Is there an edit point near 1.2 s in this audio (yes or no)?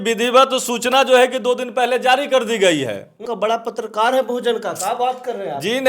no